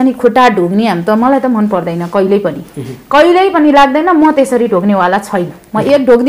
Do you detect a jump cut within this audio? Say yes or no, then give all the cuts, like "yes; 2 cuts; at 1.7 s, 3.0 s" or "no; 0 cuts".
no; 0 cuts